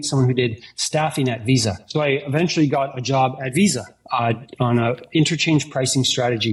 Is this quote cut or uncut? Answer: uncut